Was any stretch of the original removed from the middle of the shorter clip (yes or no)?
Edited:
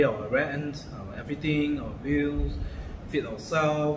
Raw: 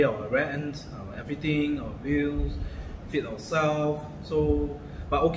no